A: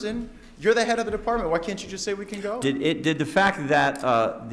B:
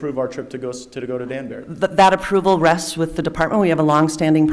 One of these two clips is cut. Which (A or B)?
A